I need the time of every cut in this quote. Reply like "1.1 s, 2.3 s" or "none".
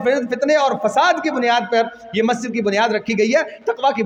none